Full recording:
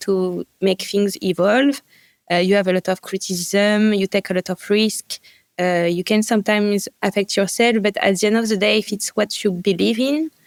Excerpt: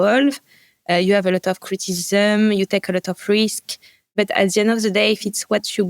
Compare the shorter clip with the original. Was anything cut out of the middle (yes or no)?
yes